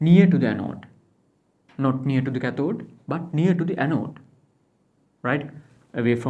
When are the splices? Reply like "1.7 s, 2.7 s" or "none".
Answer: none